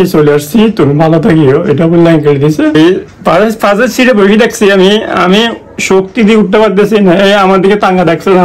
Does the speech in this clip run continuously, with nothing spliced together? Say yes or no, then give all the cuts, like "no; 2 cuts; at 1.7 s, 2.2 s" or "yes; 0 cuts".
no; 1 cut; at 2.7 s